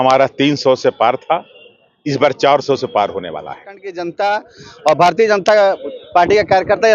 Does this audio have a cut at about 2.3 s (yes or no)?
no